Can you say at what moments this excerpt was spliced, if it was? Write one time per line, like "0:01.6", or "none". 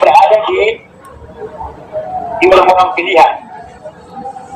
0:01.4